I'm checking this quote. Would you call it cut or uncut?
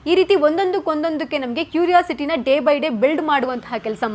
uncut